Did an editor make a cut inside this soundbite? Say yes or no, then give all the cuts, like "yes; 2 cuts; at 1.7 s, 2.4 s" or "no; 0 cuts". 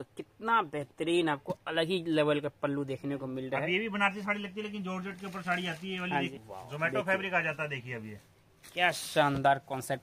yes; 1 cut; at 6.3 s